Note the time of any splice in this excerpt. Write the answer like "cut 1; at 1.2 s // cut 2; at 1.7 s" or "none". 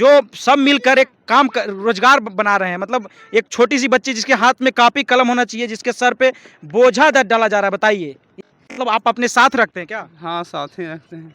cut 1; at 8.4 s